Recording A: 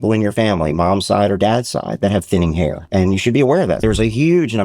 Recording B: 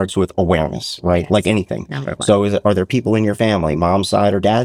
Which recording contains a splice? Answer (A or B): A